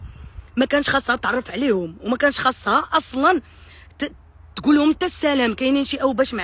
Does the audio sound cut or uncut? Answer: uncut